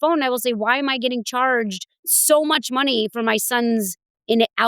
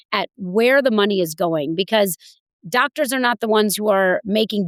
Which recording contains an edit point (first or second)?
first